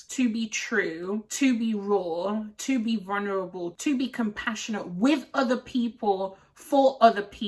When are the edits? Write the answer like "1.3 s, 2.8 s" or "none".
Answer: none